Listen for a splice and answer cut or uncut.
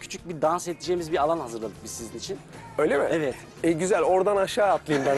uncut